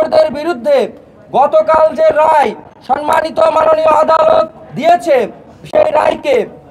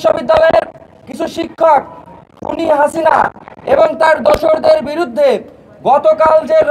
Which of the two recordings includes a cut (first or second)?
first